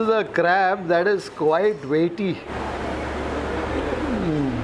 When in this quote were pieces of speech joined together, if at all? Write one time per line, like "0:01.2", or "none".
0:02.5
0:03.7